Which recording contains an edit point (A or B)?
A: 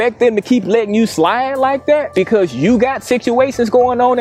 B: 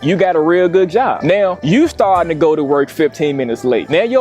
B